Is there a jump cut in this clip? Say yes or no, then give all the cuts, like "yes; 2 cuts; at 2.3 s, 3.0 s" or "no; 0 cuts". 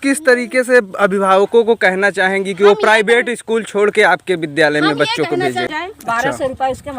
yes; 1 cut; at 5.7 s